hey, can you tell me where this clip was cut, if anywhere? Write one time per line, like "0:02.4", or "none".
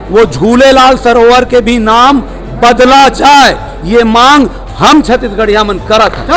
none